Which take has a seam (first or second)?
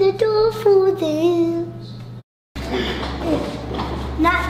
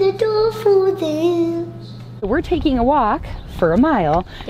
second